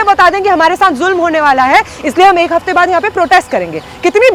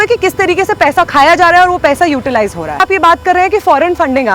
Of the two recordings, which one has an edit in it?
second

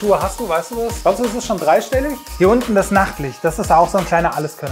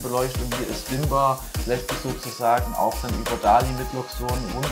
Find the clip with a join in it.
first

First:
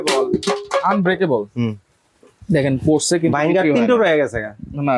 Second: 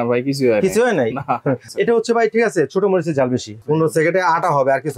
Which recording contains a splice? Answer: second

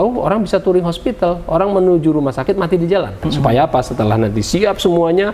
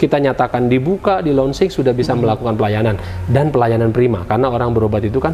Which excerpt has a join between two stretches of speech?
first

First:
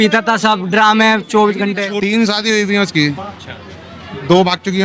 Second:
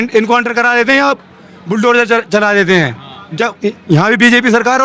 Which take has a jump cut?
first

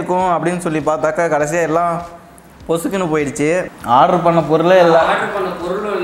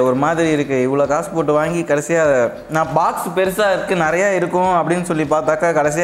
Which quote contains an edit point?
first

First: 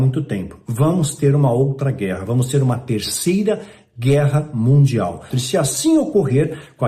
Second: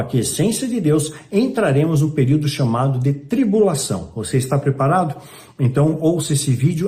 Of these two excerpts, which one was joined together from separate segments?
first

